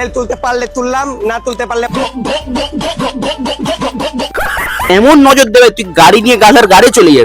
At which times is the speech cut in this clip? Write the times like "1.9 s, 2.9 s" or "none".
4.9 s